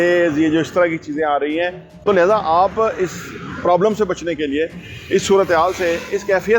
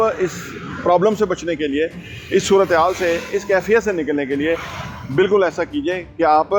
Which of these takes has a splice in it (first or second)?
first